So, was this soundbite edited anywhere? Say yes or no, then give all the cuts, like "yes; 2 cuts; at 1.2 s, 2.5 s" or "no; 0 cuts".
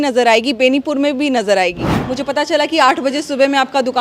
yes; 1 cut; at 2.0 s